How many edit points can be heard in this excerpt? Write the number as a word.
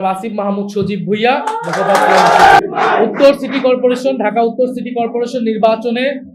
one